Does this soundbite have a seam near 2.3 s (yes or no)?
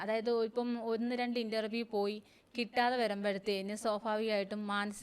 no